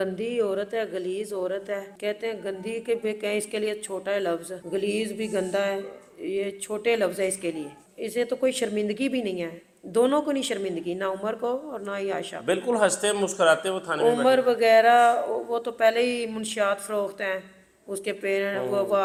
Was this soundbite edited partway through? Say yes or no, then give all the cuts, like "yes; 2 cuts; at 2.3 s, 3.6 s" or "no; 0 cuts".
no; 0 cuts